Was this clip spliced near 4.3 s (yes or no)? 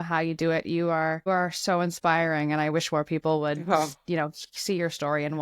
no